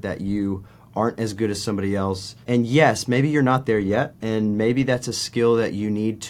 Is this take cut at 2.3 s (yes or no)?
yes